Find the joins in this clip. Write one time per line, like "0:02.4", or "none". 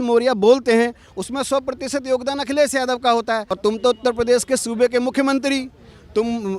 0:03.5